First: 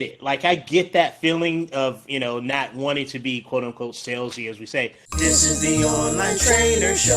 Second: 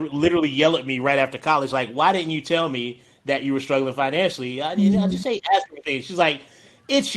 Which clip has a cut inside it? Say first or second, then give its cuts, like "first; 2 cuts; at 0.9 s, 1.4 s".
first; 1 cut; at 5.1 s